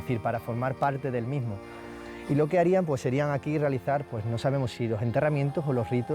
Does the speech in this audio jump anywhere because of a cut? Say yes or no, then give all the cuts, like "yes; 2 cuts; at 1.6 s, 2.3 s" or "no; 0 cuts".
no; 0 cuts